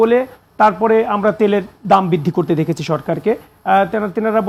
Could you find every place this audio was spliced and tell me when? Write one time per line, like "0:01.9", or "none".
none